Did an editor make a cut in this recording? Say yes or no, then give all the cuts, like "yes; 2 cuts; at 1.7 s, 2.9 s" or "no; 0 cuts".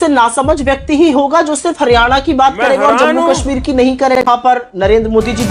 yes; 1 cut; at 4.2 s